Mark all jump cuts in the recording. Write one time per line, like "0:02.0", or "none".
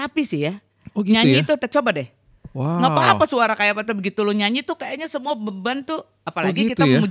none